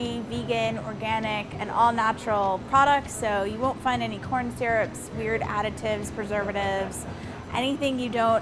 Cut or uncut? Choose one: uncut